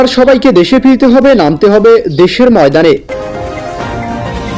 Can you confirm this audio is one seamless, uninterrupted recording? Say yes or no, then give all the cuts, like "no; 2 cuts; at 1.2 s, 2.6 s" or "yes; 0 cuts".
no; 1 cut; at 3.0 s